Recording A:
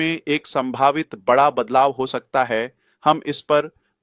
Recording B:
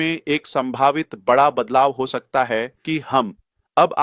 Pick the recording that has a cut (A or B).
B